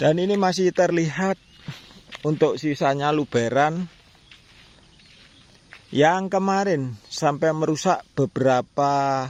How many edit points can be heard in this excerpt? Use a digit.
0